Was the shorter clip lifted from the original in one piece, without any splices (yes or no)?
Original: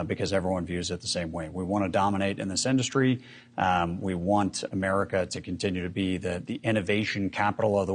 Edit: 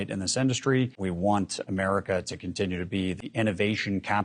no